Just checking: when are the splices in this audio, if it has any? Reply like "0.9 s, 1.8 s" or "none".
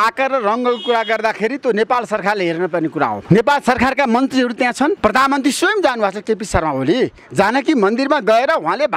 3.2 s, 5.0 s